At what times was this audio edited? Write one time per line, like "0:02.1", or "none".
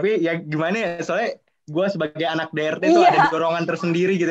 none